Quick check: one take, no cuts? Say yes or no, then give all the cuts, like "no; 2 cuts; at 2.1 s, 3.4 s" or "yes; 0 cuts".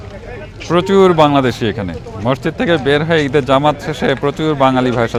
yes; 0 cuts